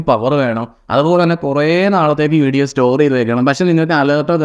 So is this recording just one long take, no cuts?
yes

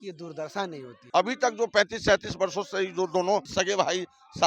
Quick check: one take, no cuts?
no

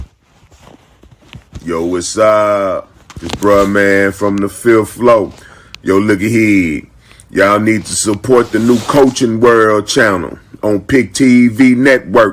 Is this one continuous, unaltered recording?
yes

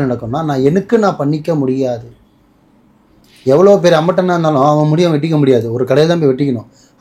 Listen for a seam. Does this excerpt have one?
no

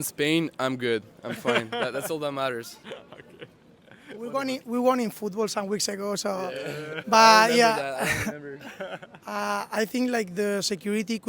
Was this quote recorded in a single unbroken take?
yes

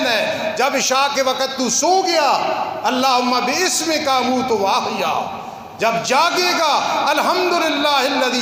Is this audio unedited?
yes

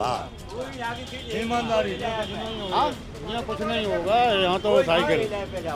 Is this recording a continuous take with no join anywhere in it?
yes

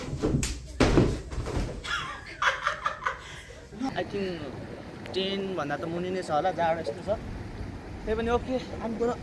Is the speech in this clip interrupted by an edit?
yes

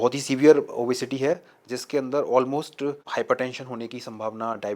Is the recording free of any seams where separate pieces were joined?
yes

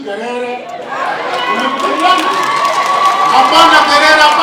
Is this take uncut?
yes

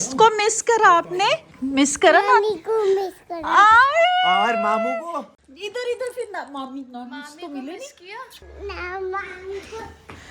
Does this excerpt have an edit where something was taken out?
yes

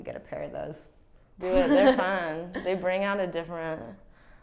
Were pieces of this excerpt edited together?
no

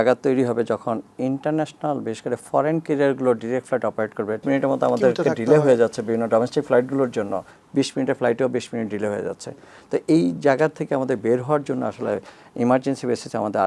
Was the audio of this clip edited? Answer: yes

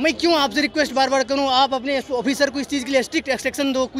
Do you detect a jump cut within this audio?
no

